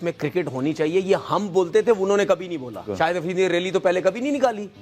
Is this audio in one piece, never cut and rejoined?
no; 1 cut; at 2.8 s

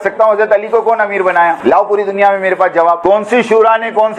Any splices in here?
yes; 2 cuts; at 1.6 s, 3.0 s

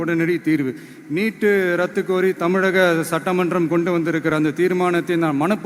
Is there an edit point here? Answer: no; 0 cuts

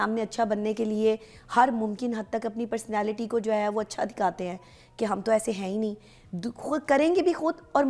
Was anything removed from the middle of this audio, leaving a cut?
no; 0 cuts

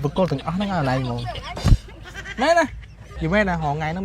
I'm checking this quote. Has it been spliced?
yes; 1 cut; at 3.1 s

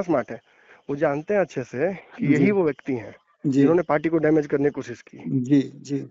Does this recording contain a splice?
no; 0 cuts

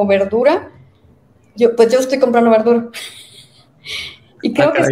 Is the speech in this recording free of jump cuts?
yes; 0 cuts

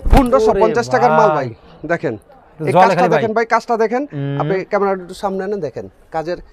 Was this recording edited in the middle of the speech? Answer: no; 0 cuts

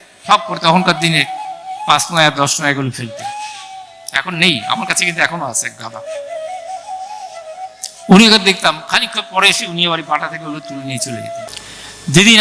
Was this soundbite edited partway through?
yes; 1 cut; at 11.5 s

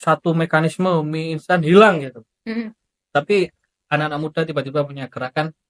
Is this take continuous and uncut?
yes; 0 cuts

